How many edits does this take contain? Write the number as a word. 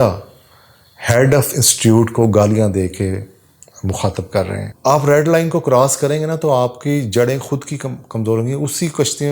one